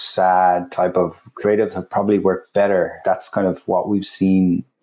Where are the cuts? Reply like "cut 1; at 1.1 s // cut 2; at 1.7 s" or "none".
cut 1; at 3.0 s